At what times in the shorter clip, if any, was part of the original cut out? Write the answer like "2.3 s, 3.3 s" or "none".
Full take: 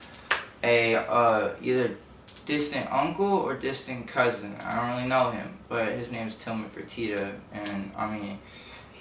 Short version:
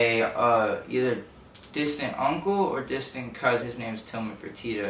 3.7 s